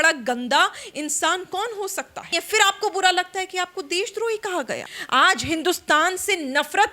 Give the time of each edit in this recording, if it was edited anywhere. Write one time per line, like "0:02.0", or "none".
0:02.3
0:04.9